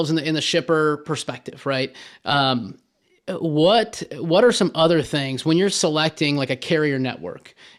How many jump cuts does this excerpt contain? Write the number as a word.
zero